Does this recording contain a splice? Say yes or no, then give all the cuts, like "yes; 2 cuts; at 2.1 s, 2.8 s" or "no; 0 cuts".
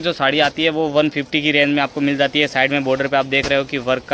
no; 0 cuts